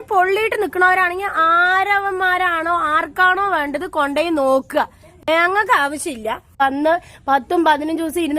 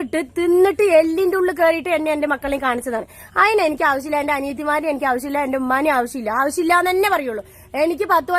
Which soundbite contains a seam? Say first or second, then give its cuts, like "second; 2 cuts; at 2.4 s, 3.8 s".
first; 1 cut; at 6.6 s